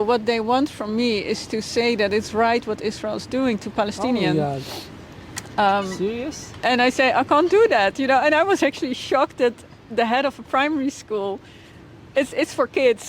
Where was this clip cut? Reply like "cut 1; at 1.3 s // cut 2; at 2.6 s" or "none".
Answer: none

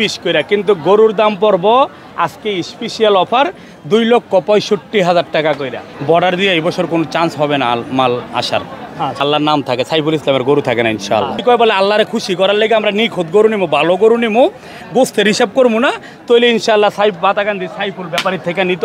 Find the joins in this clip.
cut 1; at 5.9 s // cut 2; at 9.2 s // cut 3; at 11.4 s

